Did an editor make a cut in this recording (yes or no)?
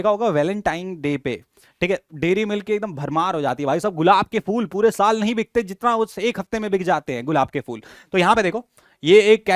no